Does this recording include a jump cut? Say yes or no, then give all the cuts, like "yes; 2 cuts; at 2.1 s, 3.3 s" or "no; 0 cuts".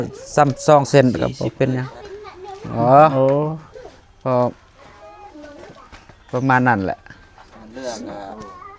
no; 0 cuts